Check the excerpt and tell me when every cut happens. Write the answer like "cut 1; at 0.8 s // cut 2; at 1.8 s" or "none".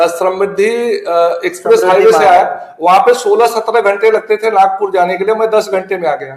none